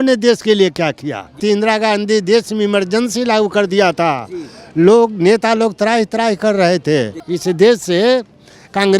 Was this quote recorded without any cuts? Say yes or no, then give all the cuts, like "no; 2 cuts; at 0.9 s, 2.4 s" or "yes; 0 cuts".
no; 2 cuts; at 1.4 s, 7.2 s